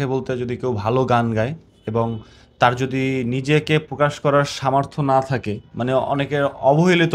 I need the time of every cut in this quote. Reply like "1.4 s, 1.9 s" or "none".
none

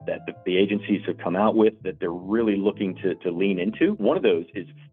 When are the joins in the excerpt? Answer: 4.0 s

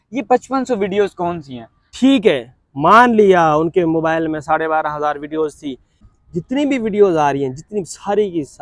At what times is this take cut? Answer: 1.9 s, 6.0 s

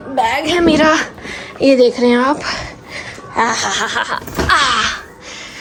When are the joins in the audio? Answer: none

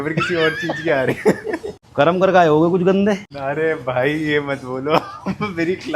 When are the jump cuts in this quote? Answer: 1.8 s, 3.3 s

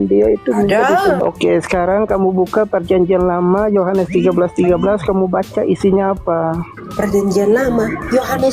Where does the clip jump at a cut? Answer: 1.2 s

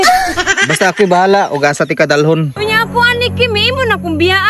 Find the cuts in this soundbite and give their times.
2.5 s

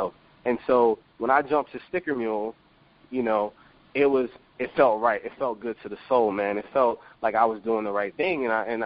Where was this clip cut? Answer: none

